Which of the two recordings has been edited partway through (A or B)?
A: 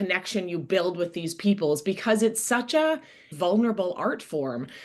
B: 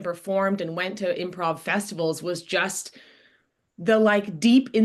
A